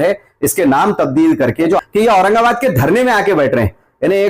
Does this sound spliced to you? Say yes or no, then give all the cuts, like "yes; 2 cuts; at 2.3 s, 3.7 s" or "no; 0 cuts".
yes; 1 cut; at 1.8 s